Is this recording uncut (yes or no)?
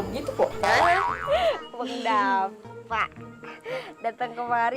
no